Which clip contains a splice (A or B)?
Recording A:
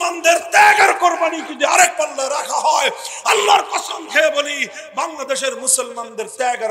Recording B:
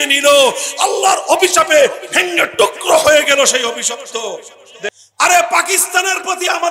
B